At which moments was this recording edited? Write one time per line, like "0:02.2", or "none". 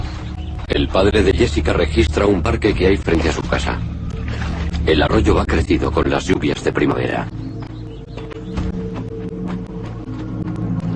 0:02.5